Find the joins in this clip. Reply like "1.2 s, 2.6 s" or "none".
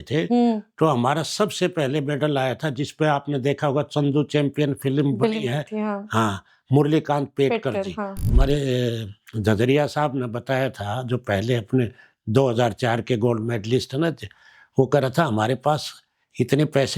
8.3 s